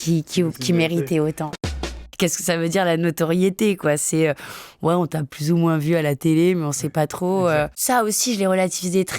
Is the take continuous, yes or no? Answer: no